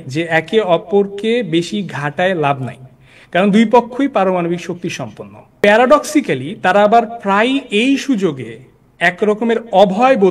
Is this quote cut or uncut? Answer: cut